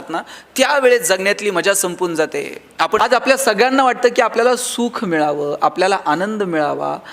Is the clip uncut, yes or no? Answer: no